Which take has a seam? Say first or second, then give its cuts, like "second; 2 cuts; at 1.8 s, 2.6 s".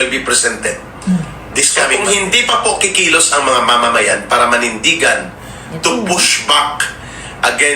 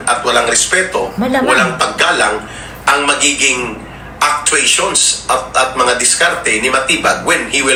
first; 1 cut; at 1.9 s